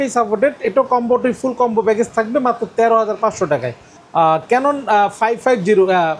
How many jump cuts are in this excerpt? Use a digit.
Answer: 0